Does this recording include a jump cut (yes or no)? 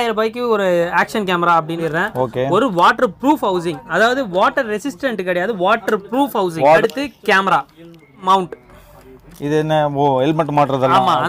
yes